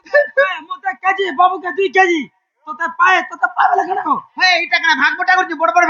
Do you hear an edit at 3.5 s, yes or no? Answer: no